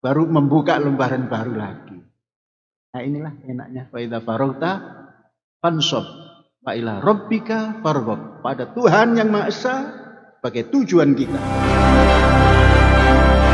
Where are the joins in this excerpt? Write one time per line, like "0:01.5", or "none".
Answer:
0:11.4